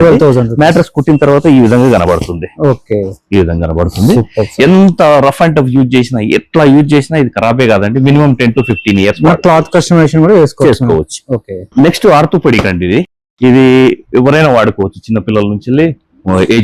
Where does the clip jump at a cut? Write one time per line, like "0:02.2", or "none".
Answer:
none